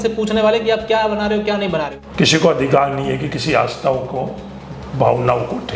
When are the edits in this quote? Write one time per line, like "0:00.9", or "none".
0:02.0